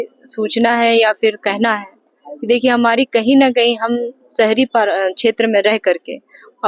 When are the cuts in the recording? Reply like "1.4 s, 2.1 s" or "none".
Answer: none